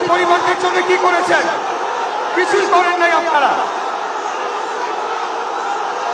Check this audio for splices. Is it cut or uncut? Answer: uncut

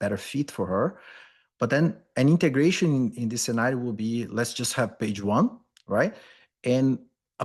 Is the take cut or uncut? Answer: uncut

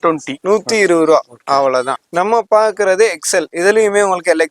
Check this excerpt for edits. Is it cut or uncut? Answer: cut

